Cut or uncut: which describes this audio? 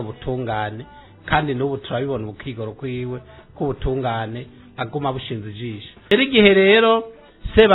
cut